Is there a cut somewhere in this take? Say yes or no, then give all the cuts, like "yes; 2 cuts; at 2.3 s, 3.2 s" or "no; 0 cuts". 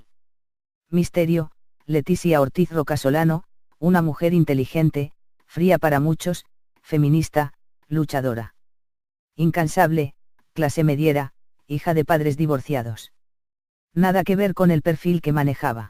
no; 0 cuts